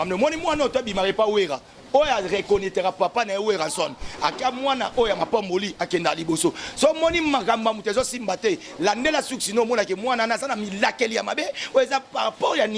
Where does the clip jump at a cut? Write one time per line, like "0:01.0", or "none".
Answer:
none